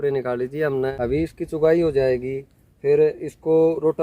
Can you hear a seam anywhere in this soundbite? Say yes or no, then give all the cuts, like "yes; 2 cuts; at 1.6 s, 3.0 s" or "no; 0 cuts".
yes; 1 cut; at 0.9 s